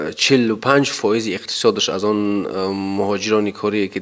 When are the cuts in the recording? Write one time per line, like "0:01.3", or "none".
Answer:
none